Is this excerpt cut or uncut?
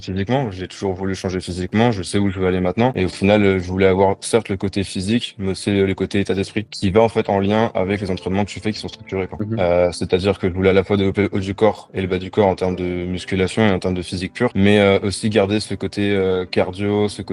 cut